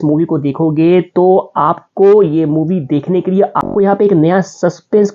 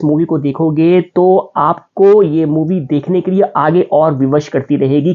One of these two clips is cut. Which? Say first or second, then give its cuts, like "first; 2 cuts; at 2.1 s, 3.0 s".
first; 1 cut; at 3.6 s